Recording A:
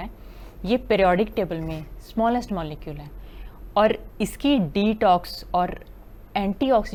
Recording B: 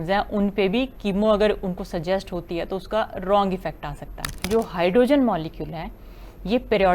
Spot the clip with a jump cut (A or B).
B